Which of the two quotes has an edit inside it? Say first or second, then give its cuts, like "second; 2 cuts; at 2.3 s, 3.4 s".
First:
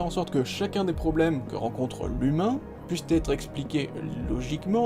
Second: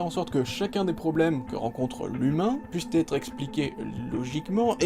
second; 1 cut; at 2.7 s